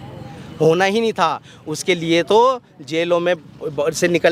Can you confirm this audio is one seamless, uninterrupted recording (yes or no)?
yes